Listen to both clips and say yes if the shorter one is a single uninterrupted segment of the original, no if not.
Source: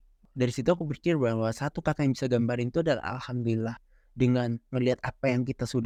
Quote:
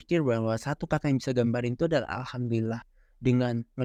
yes